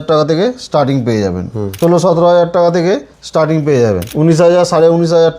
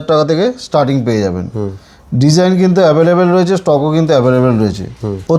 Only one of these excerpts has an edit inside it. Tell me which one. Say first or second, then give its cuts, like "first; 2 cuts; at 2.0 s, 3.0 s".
first; 2 cuts; at 1.8 s, 4.1 s